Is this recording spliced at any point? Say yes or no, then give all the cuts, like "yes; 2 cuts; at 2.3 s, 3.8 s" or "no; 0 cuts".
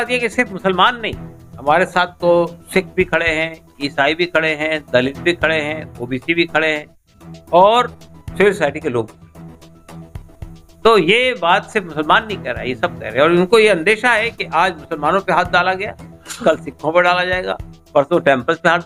no; 0 cuts